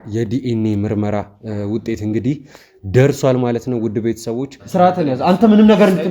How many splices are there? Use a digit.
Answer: 1